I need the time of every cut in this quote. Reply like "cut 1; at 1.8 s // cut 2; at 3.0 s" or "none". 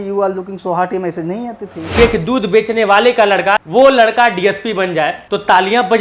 cut 1; at 1.9 s // cut 2; at 3.6 s // cut 3; at 5.2 s